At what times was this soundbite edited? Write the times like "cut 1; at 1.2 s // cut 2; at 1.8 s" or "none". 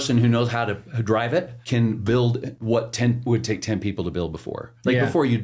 cut 1; at 1.6 s // cut 2; at 2.5 s